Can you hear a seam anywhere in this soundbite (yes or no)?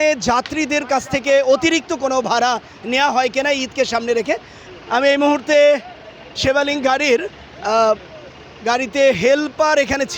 yes